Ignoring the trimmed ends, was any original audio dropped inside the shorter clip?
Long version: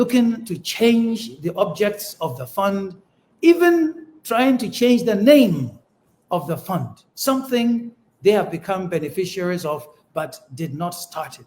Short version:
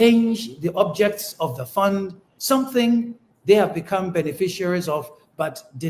yes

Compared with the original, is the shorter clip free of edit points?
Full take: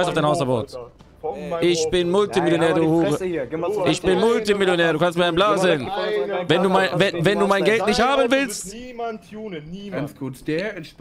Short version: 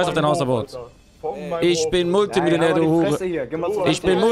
yes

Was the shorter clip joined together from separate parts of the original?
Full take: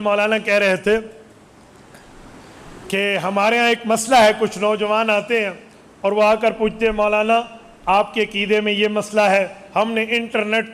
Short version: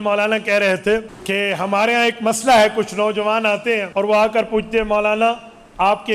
yes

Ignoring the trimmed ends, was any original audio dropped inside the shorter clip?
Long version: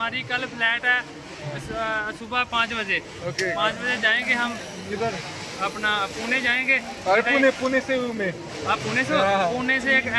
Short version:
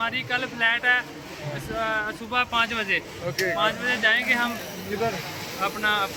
no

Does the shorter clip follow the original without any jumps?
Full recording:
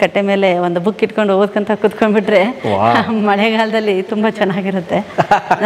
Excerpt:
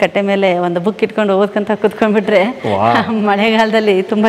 yes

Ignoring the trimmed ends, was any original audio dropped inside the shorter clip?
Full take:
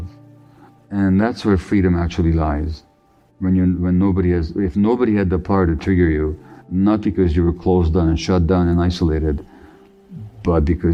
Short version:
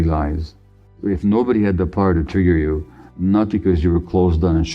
yes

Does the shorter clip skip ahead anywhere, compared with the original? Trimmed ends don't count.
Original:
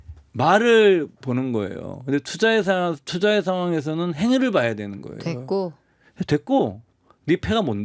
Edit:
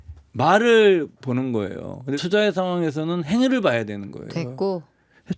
yes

